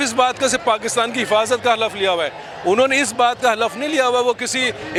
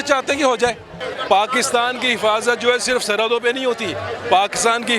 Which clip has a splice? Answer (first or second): second